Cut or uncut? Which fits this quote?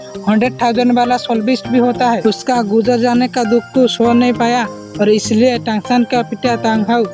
uncut